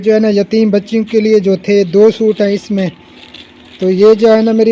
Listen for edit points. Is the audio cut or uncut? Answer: uncut